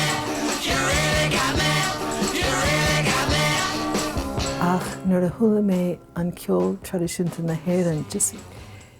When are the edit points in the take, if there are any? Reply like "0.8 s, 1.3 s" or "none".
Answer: 4.5 s